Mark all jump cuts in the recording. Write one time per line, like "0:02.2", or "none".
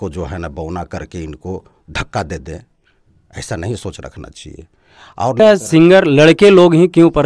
0:05.4